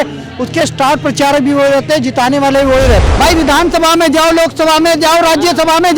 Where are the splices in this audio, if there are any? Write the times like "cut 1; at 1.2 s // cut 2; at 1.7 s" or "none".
cut 1; at 3.1 s